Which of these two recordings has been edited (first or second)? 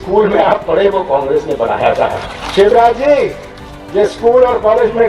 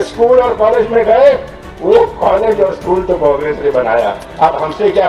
first